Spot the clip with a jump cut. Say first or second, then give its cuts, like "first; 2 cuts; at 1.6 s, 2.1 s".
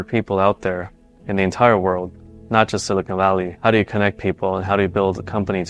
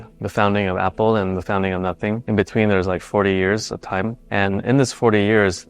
second; 1 cut; at 4.2 s